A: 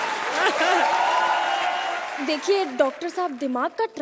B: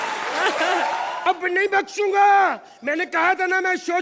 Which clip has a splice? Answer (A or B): B